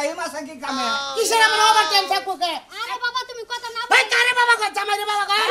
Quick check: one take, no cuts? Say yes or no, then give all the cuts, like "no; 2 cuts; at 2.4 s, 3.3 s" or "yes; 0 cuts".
no; 1 cut; at 2.7 s